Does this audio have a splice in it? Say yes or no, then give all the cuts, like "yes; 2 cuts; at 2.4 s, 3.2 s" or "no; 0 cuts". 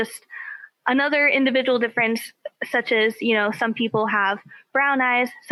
no; 0 cuts